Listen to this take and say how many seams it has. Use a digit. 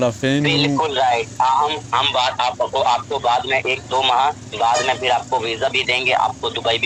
0